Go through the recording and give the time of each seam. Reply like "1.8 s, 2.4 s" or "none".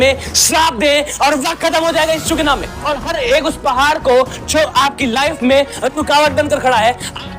2.7 s